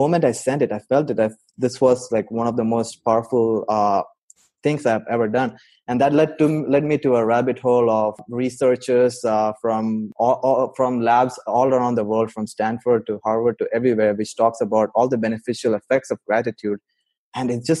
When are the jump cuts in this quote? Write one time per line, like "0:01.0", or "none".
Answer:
0:08.3
0:10.1

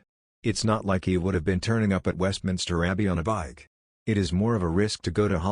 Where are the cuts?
0:04.1

